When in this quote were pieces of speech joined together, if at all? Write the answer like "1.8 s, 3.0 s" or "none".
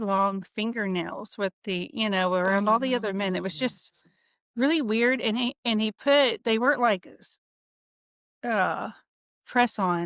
none